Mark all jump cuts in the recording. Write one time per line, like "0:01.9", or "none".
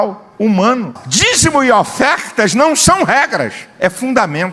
0:01.0